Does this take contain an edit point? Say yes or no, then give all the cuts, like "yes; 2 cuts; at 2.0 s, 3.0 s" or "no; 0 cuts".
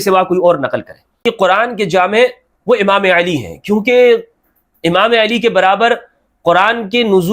yes; 1 cut; at 1.2 s